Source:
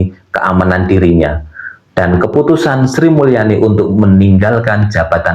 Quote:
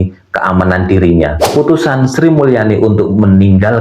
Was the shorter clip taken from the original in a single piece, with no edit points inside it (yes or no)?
no